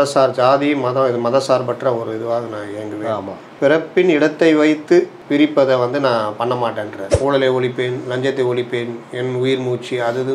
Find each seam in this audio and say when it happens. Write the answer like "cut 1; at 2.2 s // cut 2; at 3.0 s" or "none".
cut 1; at 7.0 s